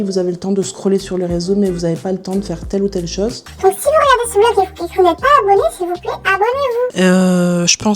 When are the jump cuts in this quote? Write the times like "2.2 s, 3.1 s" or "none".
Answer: 3.4 s, 6.9 s